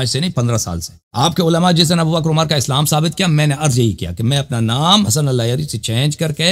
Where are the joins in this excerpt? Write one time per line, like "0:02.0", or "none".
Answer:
0:05.1

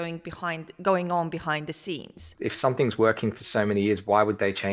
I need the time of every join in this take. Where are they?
0:02.3

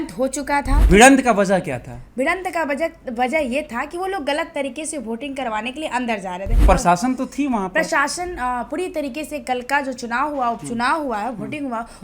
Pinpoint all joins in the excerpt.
0:00.9
0:06.6

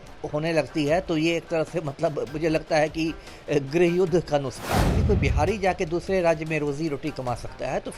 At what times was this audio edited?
0:05.0

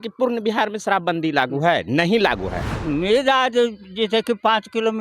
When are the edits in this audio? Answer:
0:02.7

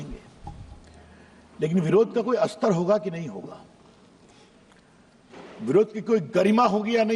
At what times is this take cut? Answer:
none

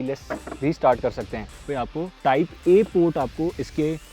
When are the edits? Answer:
0:01.6

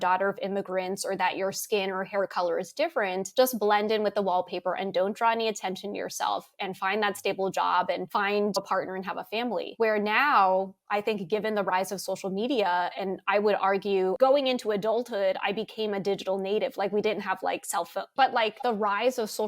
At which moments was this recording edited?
0:14.2
0:18.1

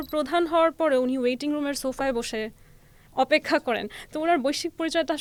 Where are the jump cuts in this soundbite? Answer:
none

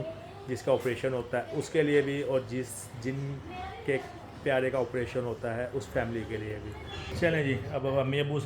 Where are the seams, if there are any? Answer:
0:07.1

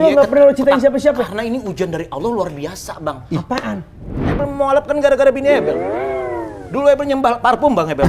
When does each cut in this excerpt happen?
0:04.2

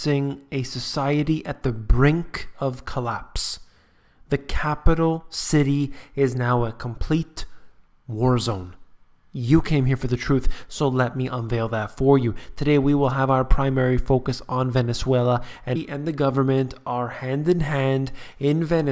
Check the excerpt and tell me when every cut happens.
none

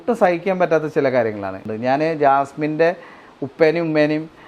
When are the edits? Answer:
0:01.7

